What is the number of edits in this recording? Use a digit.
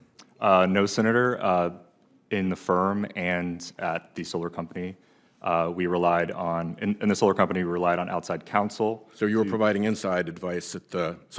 0